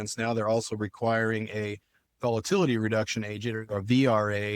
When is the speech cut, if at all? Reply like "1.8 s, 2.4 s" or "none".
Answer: 2.0 s